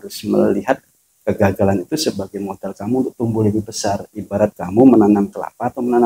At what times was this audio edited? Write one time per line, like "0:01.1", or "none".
none